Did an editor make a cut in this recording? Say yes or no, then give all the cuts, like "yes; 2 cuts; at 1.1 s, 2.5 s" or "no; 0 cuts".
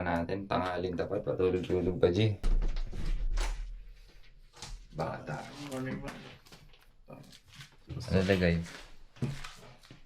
yes; 1 cut; at 2.4 s